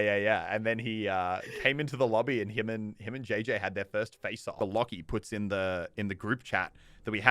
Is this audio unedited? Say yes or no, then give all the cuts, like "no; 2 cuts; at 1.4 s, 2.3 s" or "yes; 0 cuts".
no; 1 cut; at 4.6 s